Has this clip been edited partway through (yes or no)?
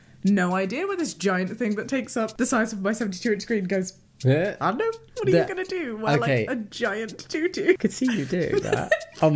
yes